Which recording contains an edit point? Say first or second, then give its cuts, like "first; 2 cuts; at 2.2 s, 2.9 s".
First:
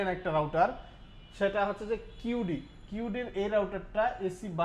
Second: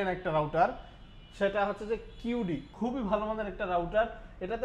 second; 1 cut; at 2.7 s